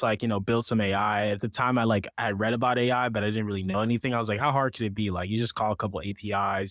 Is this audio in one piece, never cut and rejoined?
yes; 0 cuts

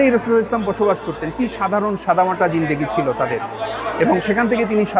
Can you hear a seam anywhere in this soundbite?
no; 0 cuts

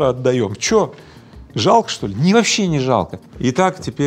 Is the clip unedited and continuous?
yes; 0 cuts

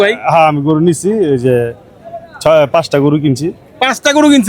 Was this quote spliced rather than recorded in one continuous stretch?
no; 0 cuts

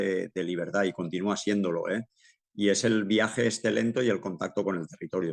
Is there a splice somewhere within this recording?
no; 0 cuts

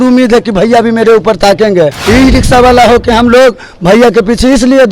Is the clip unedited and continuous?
no; 1 cut; at 2.0 s

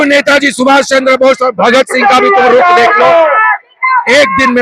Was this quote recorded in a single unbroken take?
yes; 0 cuts

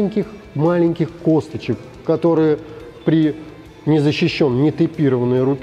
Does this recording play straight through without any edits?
yes; 0 cuts

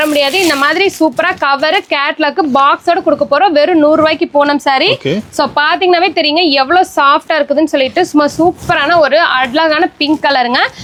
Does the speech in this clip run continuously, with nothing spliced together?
yes; 0 cuts

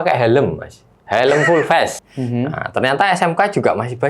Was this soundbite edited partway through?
yes; 1 cut; at 2.1 s

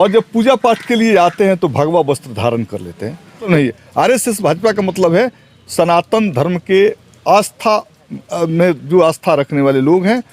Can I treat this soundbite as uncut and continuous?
no; 1 cut; at 3.5 s

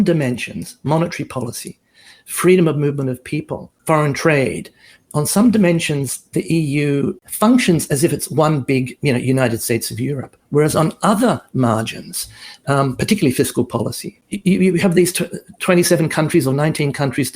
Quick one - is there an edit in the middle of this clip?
yes; 3 cuts; at 3.7 s, 7.2 s, 14.1 s

